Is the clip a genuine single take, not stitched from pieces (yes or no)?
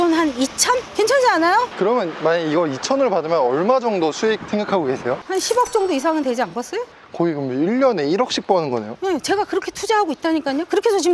no